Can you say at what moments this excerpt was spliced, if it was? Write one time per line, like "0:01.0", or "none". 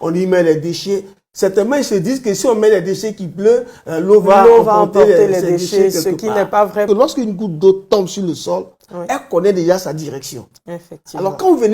0:06.9